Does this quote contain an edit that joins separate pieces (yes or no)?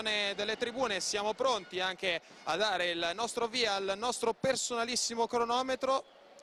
no